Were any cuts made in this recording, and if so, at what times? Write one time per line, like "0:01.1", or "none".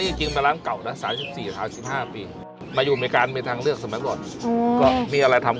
0:02.4